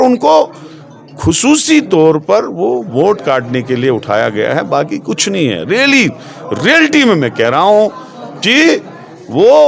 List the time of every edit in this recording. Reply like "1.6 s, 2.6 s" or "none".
none